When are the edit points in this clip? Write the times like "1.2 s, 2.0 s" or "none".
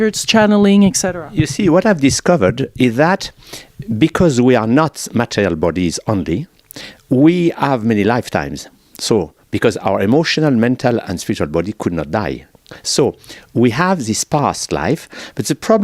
14.5 s